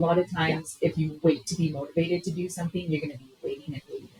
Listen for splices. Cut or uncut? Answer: uncut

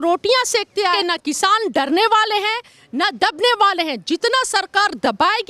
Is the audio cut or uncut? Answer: cut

